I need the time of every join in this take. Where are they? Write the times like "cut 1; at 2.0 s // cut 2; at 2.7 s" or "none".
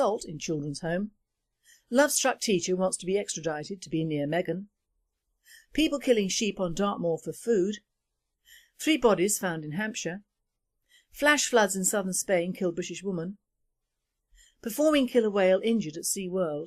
cut 1; at 5.7 s